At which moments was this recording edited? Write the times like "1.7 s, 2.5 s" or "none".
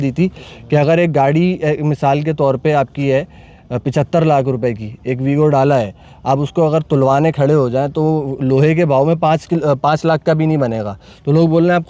none